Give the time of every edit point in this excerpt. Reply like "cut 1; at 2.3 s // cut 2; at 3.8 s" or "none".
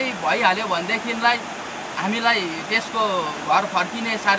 none

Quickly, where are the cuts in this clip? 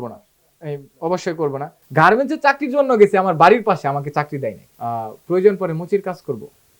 cut 1; at 1.8 s // cut 2; at 4.7 s

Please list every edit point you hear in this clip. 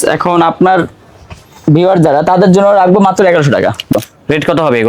cut 1; at 3.9 s

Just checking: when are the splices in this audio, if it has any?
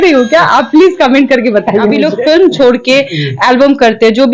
cut 1; at 2.0 s

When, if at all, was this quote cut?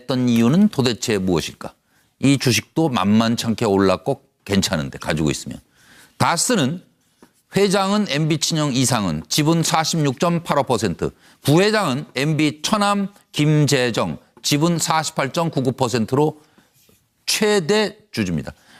none

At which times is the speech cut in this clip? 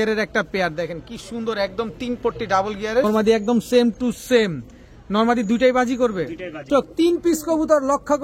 cut 1; at 3.0 s // cut 2; at 6.7 s

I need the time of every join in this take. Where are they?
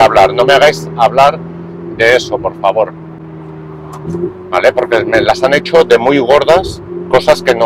none

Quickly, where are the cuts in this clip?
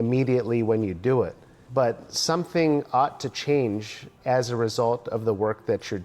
none

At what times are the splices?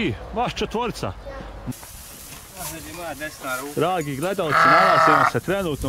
cut 1; at 1.7 s

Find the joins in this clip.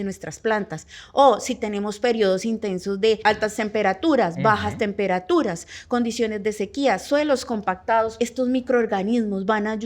cut 1; at 3.2 s // cut 2; at 8.2 s

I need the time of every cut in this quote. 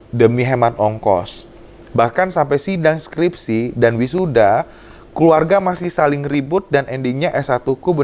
none

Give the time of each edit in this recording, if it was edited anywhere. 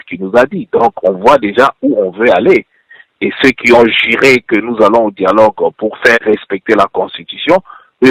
cut 1; at 5.8 s

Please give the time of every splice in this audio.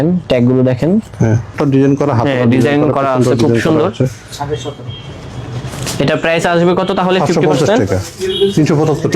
cut 1; at 1.5 s

